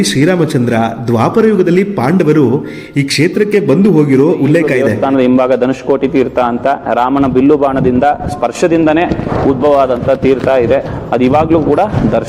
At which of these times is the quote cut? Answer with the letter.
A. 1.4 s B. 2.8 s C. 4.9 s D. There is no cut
C